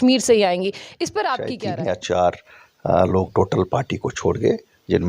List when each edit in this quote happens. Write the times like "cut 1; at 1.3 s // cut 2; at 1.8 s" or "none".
cut 1; at 1.5 s